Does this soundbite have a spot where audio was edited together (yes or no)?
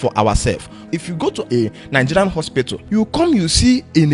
yes